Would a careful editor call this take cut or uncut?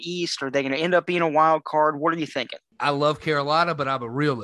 cut